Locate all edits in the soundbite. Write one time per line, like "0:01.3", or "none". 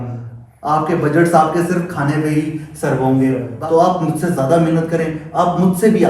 0:03.5